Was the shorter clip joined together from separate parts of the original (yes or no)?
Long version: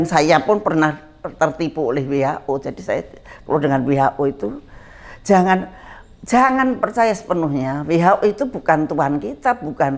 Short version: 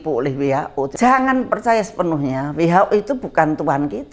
yes